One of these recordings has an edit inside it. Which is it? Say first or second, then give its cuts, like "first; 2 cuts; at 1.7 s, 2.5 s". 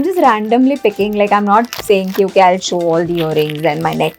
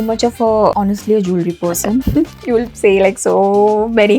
second; 2 cuts; at 0.7 s, 2.1 s